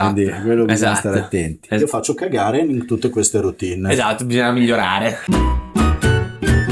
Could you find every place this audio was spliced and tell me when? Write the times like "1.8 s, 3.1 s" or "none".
1.8 s, 5.2 s